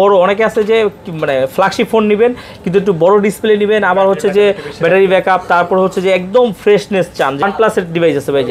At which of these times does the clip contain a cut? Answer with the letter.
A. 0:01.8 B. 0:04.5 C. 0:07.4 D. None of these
C